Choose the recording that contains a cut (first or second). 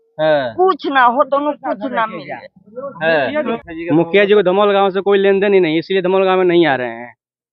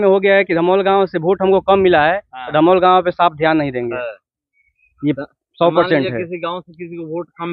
first